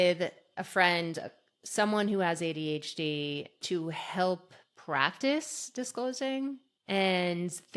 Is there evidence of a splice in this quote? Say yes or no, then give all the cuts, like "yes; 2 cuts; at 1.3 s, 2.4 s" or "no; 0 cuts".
yes; 2 cuts; at 3.6 s, 6.7 s